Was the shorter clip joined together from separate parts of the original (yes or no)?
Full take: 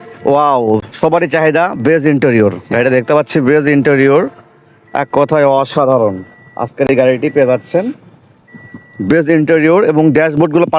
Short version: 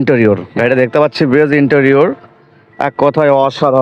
no